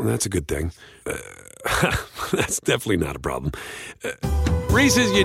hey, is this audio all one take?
yes; 0 cuts

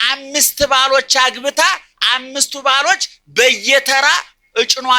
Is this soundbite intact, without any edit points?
yes; 0 cuts

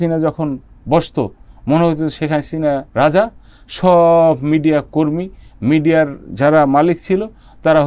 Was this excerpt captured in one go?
yes; 0 cuts

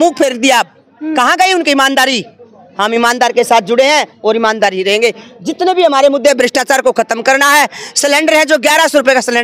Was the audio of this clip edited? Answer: no; 0 cuts

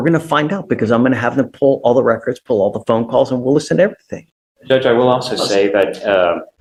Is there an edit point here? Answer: no; 0 cuts

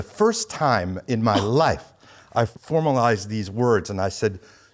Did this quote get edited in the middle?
yes; 1 cut; at 2.5 s

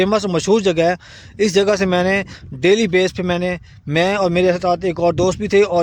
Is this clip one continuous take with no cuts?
yes; 0 cuts

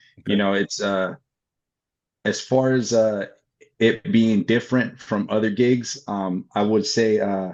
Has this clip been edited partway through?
no; 0 cuts

